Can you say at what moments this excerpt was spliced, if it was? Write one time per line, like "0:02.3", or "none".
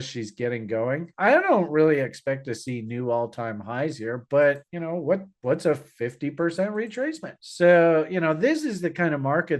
0:01.1

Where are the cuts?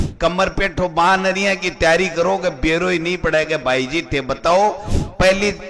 none

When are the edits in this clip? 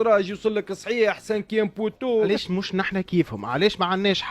0:02.3

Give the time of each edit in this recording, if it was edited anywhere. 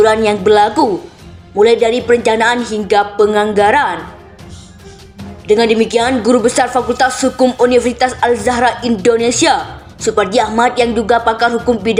none

